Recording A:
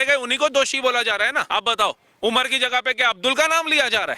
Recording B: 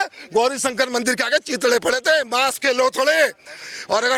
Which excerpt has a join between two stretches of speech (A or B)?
A